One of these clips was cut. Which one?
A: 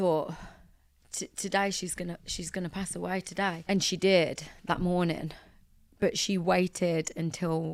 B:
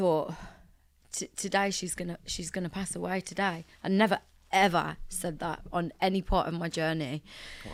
A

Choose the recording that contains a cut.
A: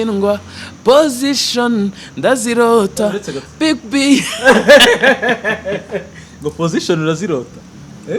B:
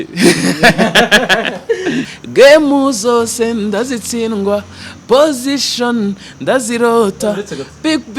B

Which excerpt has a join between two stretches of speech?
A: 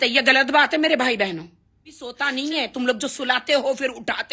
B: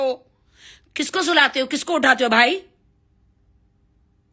A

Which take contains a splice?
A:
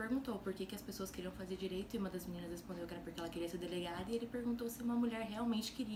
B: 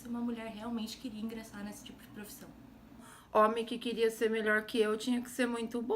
B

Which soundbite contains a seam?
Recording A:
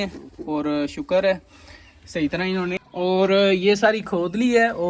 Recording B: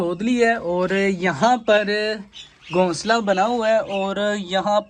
A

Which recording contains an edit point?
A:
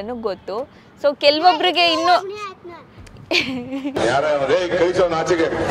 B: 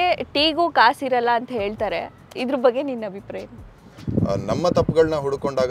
B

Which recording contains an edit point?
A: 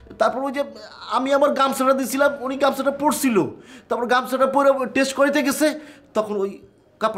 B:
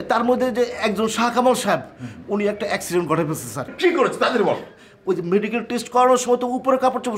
B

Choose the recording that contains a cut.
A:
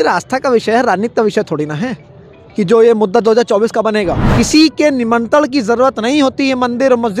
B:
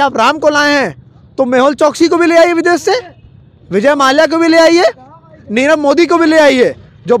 A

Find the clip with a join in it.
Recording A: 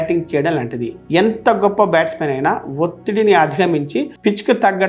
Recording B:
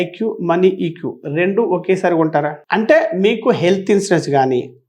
B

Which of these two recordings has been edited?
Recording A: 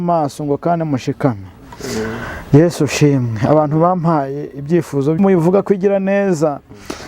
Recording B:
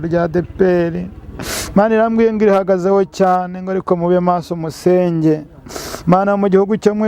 A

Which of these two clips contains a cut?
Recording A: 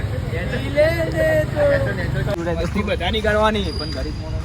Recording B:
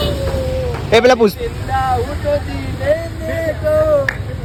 A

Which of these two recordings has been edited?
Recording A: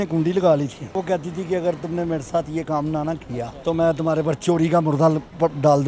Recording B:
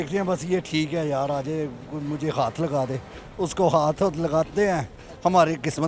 A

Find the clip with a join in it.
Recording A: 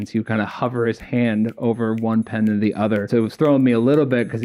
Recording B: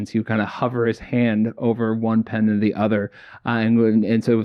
A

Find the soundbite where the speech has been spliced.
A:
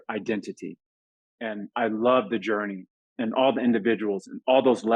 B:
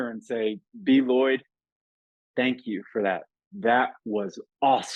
A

